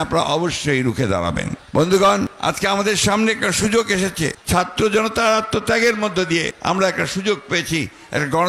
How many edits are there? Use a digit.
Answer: 4